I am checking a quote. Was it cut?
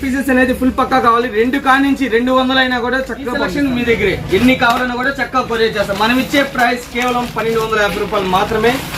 yes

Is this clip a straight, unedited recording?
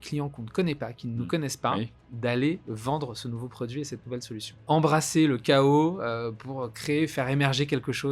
no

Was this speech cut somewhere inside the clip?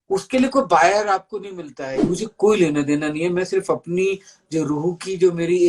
yes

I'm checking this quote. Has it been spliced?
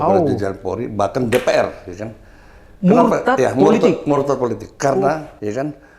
no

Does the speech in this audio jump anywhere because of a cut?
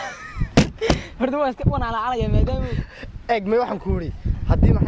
no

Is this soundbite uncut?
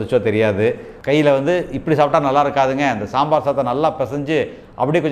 no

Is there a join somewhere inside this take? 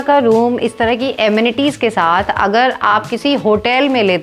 no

